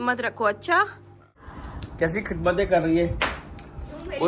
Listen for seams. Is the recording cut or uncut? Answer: cut